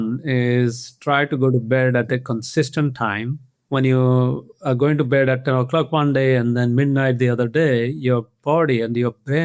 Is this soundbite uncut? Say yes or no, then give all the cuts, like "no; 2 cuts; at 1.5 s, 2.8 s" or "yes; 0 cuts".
no; 1 cut; at 3.4 s